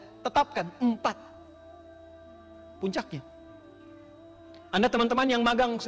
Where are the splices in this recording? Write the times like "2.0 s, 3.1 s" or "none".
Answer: 3.2 s, 4.7 s